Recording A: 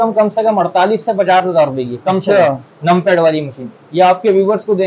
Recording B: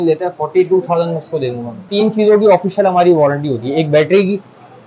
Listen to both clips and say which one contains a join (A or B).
B